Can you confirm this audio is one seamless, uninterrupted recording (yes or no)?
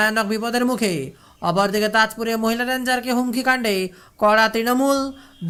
yes